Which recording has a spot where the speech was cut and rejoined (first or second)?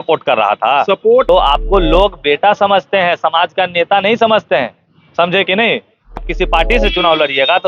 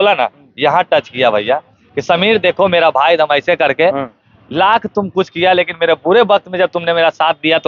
first